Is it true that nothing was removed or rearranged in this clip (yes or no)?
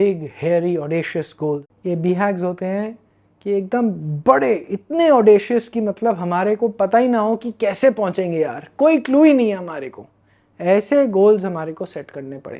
no